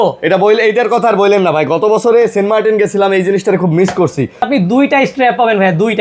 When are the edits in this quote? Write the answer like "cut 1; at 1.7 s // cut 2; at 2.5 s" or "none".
cut 1; at 4.5 s